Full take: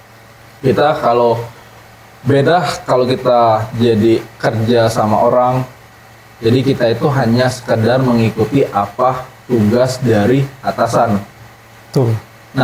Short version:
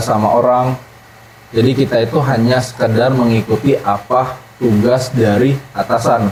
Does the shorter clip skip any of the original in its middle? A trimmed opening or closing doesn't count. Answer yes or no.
no